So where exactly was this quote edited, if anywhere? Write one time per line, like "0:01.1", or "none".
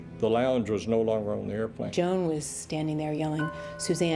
0:01.9